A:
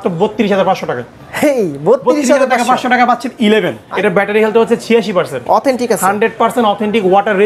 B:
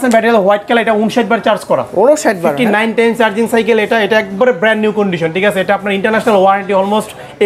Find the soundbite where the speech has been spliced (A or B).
A